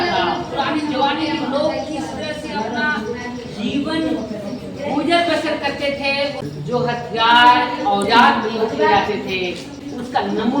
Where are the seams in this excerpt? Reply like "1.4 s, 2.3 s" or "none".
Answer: 6.4 s, 9.7 s